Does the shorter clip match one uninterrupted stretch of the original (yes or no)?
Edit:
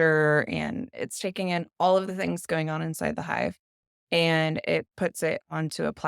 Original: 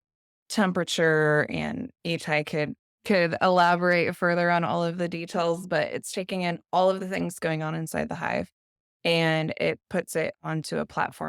no